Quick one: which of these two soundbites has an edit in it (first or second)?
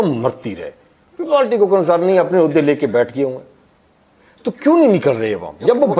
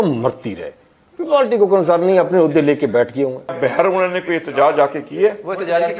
second